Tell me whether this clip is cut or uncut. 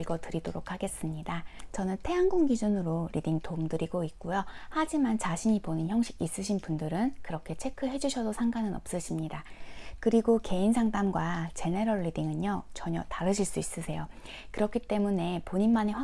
cut